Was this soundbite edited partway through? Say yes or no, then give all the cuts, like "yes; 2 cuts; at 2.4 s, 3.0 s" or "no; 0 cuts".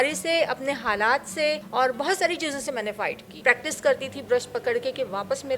yes; 2 cuts; at 1.6 s, 3.4 s